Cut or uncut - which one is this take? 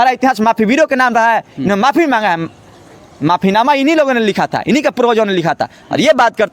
uncut